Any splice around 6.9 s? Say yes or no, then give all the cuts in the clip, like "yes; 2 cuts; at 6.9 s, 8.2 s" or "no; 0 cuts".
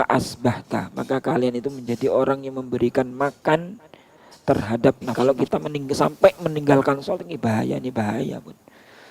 no; 1 cut; at 5.1 s